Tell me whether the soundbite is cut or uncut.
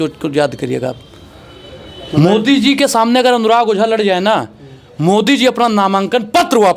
uncut